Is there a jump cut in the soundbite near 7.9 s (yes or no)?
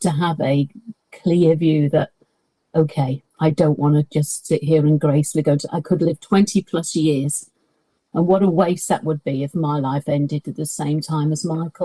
no